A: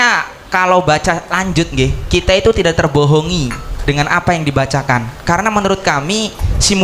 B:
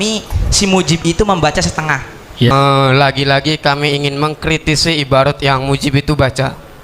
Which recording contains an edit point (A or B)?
B